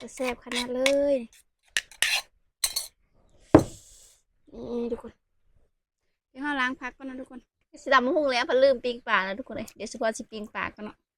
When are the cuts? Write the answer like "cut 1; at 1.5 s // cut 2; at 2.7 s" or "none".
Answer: cut 1; at 7.8 s